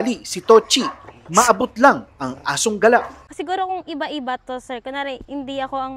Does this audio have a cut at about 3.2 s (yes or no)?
yes